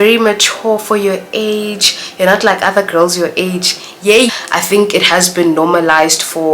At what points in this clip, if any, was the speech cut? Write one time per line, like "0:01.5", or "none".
0:04.3